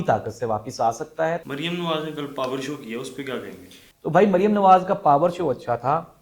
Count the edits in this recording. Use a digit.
0